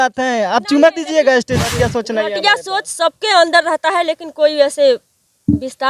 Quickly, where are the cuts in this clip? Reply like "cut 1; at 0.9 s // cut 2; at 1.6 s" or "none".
cut 1; at 1.7 s